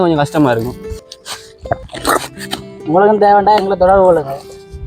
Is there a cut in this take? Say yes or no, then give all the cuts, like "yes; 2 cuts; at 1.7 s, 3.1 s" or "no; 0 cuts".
yes; 1 cut; at 1.1 s